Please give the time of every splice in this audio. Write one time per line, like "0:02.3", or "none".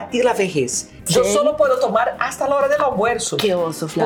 0:01.1